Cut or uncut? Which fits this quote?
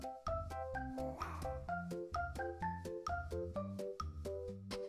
uncut